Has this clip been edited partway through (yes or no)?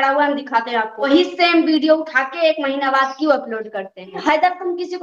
yes